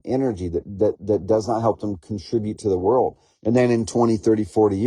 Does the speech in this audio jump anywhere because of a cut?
yes; 1 cut; at 3.3 s

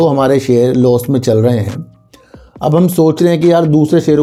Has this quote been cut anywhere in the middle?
no; 0 cuts

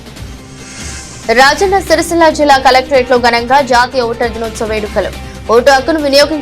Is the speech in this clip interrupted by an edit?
yes; 1 cut; at 1.0 s

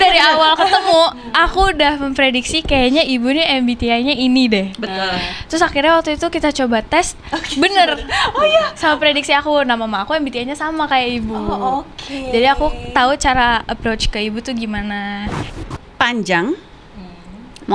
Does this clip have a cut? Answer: yes; 1 cut; at 15.5 s

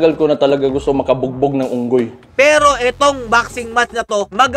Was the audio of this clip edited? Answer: yes; 1 cut; at 2.3 s

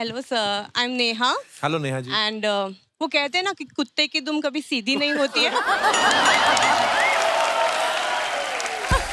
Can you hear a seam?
no; 0 cuts

